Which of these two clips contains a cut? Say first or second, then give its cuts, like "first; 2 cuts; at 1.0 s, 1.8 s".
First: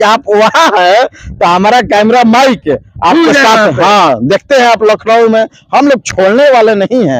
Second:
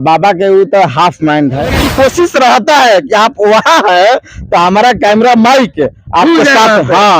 second; 1 cut; at 1.8 s